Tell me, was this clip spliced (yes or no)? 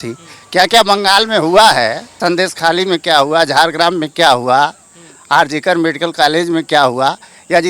yes